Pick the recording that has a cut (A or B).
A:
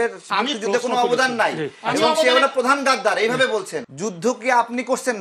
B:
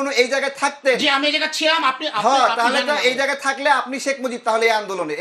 A